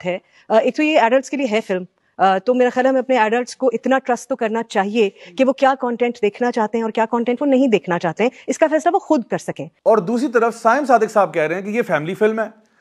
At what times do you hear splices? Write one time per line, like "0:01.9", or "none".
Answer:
none